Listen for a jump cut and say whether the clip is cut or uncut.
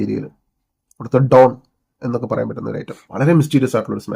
cut